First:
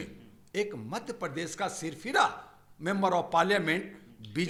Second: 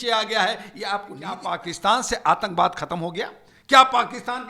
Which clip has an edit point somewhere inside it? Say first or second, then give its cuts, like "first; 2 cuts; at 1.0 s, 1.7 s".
second; 1 cut; at 1.4 s